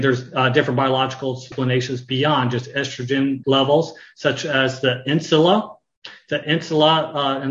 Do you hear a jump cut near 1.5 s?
yes; 2 cuts; at 1.5 s, 3.4 s

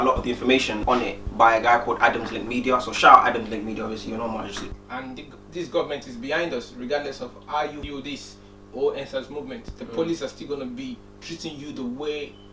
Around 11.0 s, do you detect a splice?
no; 3 cuts; at 1.2 s, 4.6 s, 7.8 s

